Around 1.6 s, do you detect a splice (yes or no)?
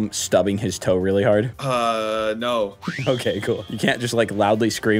yes